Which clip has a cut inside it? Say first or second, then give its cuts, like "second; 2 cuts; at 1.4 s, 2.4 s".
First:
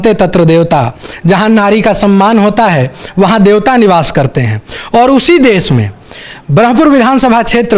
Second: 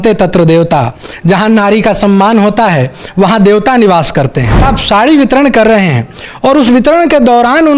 second; 1 cut; at 4.7 s